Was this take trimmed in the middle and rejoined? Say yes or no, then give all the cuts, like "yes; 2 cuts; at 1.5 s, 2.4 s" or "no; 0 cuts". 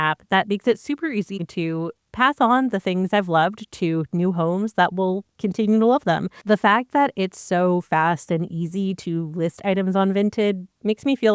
yes; 2 cuts; at 1.4 s, 6.3 s